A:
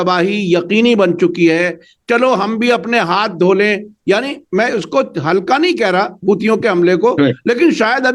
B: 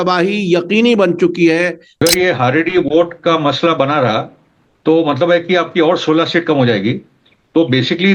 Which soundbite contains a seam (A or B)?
B